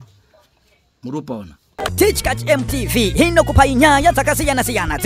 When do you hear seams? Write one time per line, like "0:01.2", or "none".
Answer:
0:01.9